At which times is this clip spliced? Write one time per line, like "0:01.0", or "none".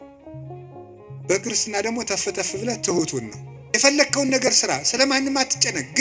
0:03.5